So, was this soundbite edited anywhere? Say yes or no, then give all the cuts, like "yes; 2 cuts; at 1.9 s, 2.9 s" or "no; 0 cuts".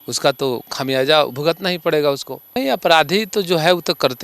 yes; 1 cut; at 2.6 s